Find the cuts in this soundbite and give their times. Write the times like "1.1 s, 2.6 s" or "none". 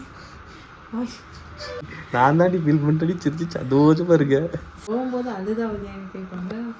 2.0 s, 4.7 s

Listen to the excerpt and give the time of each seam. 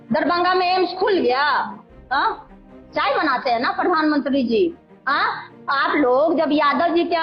2.5 s

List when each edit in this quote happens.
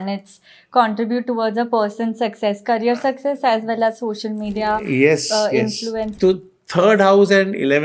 none

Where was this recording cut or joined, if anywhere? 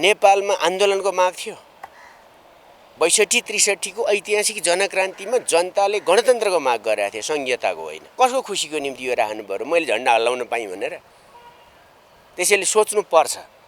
8.0 s

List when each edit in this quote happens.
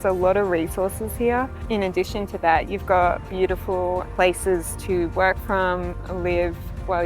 1.6 s, 4.1 s

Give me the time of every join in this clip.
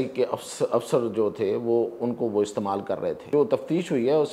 3.3 s

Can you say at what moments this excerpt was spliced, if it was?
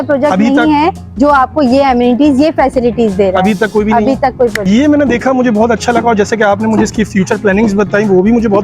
none

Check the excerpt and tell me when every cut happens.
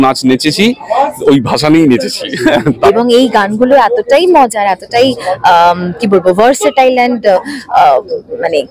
2.8 s

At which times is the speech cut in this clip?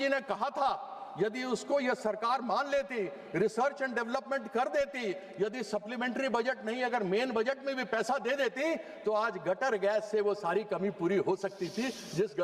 none

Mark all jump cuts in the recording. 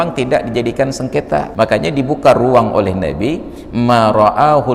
1.5 s

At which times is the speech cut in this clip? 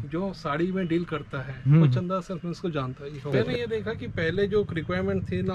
3.3 s

